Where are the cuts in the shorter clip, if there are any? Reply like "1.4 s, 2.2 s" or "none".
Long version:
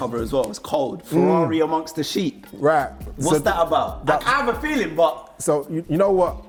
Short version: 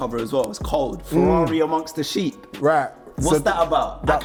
none